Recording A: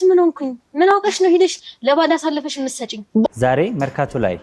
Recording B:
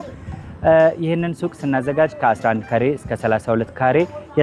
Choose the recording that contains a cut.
A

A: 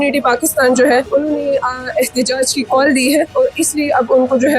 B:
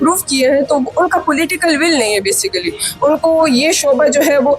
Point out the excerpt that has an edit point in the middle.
A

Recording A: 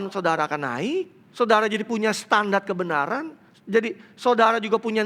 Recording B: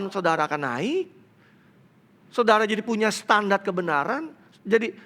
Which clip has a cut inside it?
A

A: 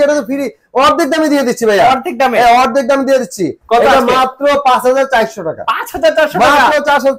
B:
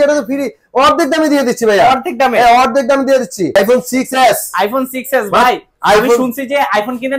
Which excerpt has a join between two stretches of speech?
B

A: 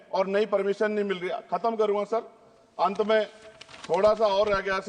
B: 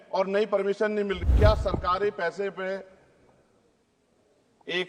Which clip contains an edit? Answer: B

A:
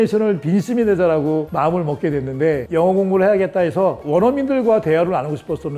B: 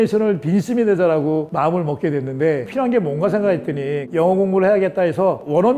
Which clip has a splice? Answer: A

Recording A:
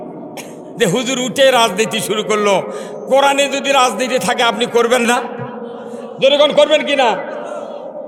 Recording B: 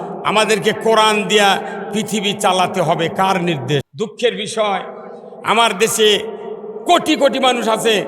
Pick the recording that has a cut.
B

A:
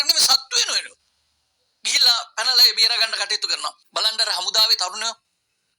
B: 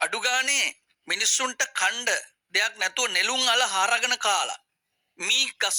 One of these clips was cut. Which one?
A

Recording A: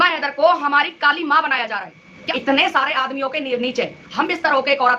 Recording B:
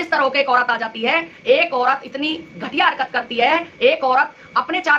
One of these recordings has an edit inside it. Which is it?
A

